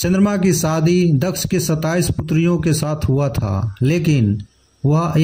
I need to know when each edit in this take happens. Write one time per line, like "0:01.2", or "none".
none

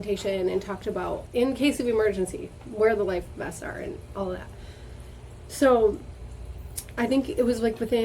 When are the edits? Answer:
0:01.2
0:06.9

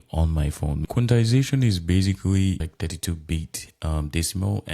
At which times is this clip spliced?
0:00.8
0:02.6

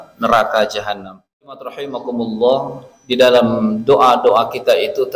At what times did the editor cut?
0:01.9

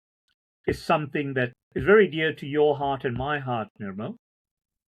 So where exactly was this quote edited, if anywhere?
0:01.6

